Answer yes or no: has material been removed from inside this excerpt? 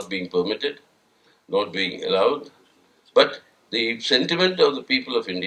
no